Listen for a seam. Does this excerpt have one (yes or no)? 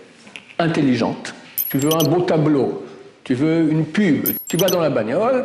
yes